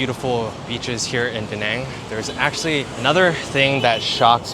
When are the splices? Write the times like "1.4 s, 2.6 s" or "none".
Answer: 2.9 s